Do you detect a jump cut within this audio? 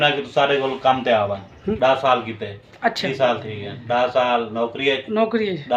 yes; 2 cuts; at 1.8 s, 3.1 s

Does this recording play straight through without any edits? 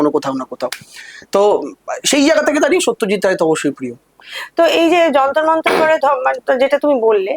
yes; 0 cuts

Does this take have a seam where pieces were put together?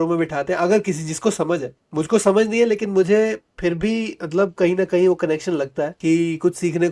yes; 1 cut; at 5.9 s

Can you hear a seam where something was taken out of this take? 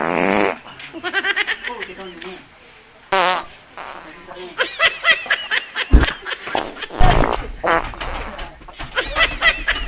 yes; 1 cut; at 7.0 s

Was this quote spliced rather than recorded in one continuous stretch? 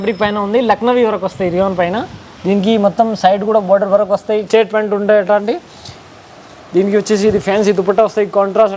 yes; 1 cut; at 4.4 s

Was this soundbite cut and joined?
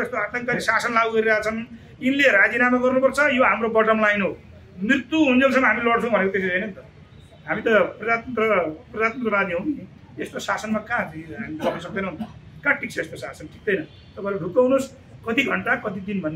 no; 0 cuts

